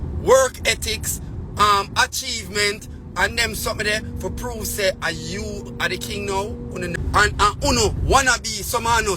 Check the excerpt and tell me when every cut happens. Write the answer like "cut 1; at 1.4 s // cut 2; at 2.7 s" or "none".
cut 1; at 7.0 s